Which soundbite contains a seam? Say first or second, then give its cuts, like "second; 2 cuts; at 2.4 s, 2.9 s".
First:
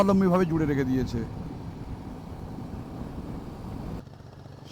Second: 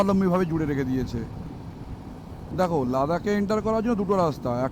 second; 1 cut; at 2.5 s